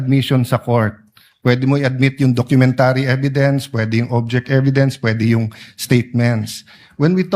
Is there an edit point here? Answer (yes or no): no